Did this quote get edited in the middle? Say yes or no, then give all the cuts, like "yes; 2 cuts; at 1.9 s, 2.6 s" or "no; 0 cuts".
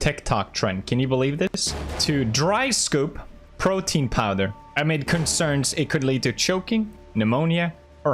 yes; 1 cut; at 6.1 s